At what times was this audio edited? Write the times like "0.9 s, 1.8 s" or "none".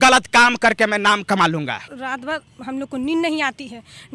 1.9 s